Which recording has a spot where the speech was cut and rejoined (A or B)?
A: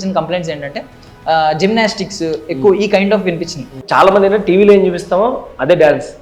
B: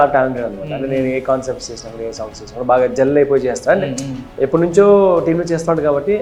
A